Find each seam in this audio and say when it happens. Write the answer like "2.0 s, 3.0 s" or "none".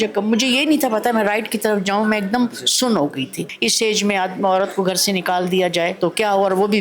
3.5 s, 5.9 s